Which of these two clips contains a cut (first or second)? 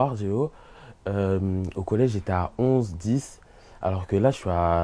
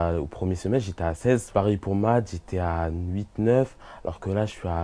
second